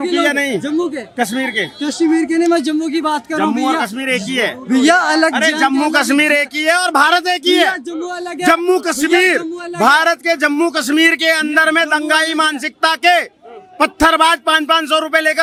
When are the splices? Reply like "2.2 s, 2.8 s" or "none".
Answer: none

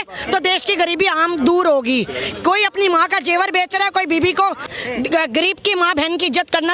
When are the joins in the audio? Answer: 4.7 s

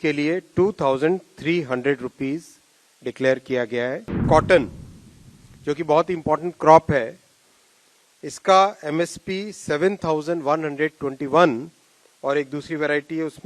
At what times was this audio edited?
4.2 s

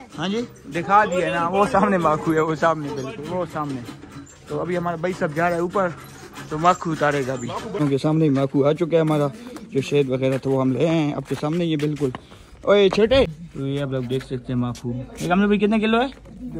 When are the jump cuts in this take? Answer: 7.7 s, 13.4 s

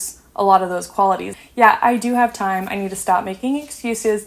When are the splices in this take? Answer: 1.4 s

